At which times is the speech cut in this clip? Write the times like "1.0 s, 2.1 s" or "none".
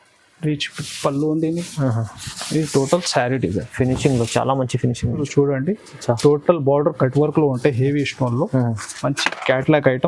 5.2 s

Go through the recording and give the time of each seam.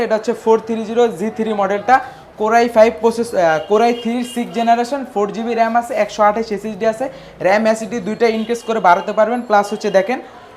none

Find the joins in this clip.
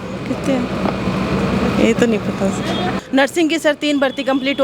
3.0 s

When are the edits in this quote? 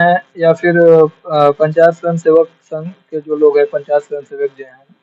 none

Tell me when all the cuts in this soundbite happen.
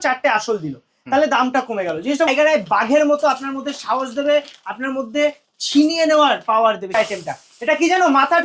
2.3 s, 6.9 s

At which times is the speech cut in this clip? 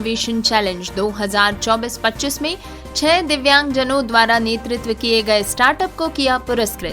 none

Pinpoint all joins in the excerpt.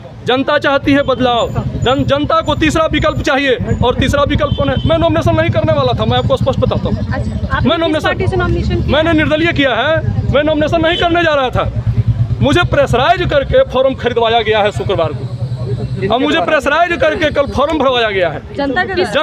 none

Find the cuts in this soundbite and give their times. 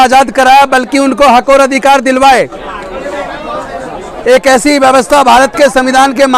none

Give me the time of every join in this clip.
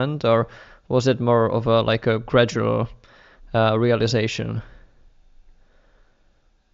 none

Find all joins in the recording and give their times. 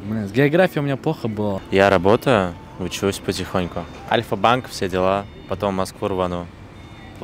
1.6 s

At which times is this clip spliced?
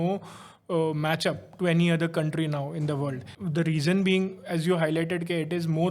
3.3 s

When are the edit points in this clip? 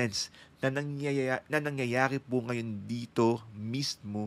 none

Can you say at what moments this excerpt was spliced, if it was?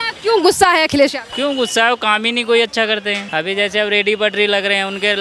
1.2 s, 3.2 s

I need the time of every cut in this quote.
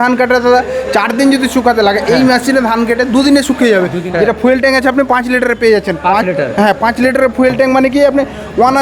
4.0 s

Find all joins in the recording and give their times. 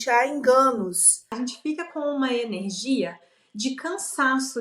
1.3 s

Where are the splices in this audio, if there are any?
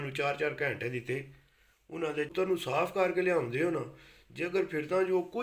2.3 s

